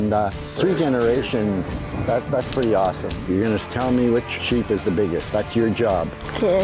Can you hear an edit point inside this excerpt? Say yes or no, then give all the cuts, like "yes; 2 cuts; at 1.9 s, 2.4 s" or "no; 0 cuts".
yes; 3 cuts; at 3.1 s, 4.4 s, 5.3 s